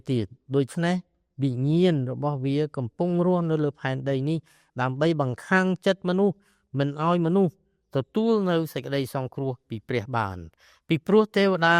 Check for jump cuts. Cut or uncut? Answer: uncut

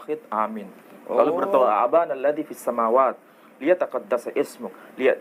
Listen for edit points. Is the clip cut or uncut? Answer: uncut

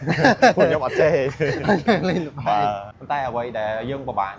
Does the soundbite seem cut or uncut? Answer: cut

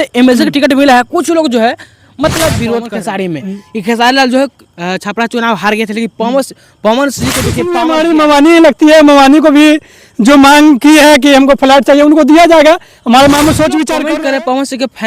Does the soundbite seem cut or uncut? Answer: cut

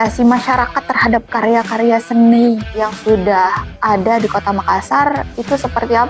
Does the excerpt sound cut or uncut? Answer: uncut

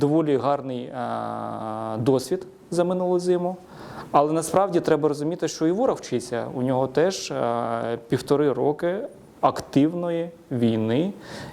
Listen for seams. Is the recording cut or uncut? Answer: uncut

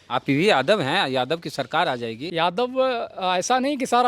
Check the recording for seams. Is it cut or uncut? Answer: cut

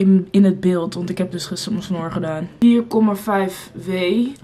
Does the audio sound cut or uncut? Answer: cut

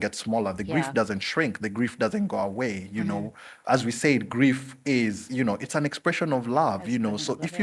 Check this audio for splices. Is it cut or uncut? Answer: uncut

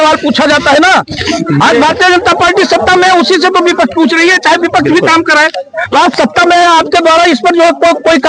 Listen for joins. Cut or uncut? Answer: uncut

